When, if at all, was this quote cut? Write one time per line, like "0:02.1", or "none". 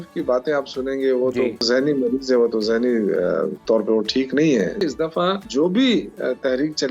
0:01.6
0:03.6
0:04.8